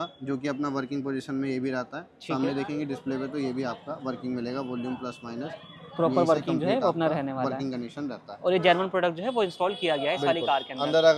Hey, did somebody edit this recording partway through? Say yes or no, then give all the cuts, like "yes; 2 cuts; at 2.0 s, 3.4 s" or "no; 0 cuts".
no; 0 cuts